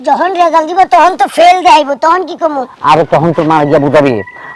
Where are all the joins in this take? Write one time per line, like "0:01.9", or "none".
none